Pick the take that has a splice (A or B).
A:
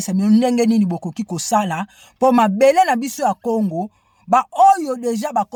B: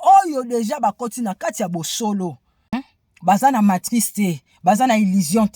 B